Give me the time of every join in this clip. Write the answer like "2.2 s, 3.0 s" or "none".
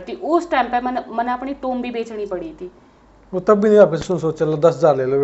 none